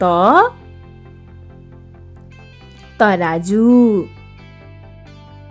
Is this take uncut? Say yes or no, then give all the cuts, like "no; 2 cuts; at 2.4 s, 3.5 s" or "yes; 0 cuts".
yes; 0 cuts